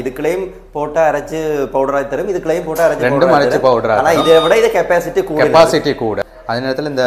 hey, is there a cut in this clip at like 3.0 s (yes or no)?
no